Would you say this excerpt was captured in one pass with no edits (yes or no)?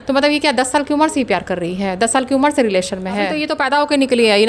no